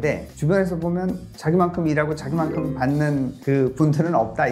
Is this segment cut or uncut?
uncut